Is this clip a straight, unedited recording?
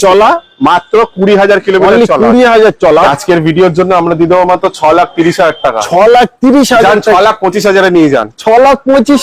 no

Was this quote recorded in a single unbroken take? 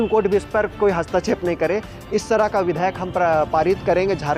yes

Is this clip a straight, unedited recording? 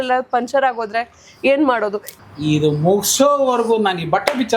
no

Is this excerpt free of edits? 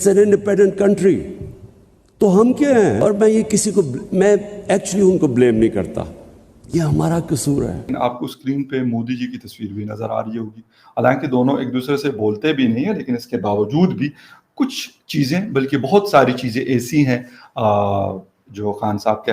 yes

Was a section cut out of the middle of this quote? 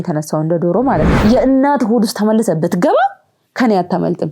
yes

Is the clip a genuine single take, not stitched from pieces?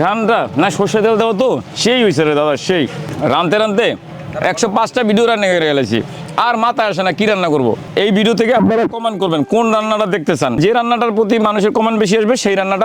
no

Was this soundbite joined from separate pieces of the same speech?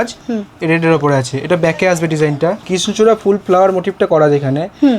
yes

